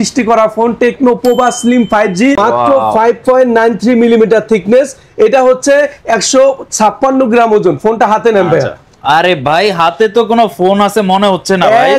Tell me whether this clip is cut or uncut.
cut